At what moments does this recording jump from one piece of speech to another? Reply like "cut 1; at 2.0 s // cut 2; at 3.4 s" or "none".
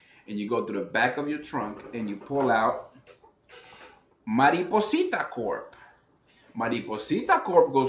none